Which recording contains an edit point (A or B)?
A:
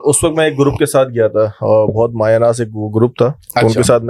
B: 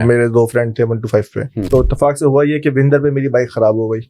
B